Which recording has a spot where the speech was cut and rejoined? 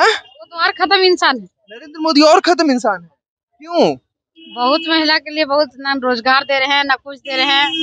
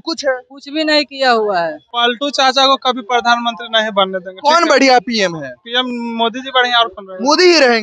second; 1 cut; at 1.8 s

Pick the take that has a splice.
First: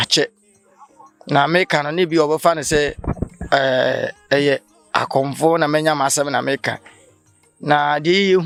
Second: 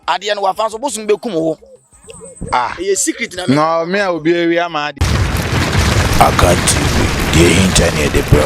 second; 1 cut; at 4.9 s

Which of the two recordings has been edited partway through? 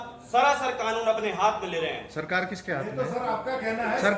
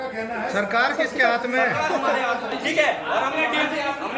second; 1 cut; at 2.5 s

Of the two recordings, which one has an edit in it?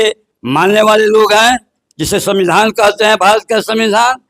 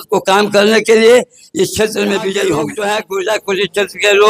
second; 1 cut; at 2.7 s

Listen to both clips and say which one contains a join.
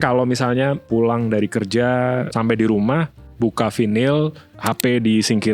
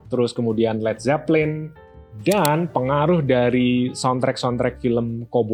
first; 4 cuts; at 0.9 s, 2.2 s, 3.2 s, 4.5 s

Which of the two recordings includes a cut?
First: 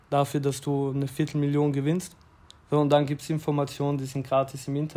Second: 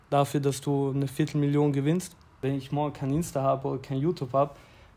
second; 1 cut; at 2.4 s

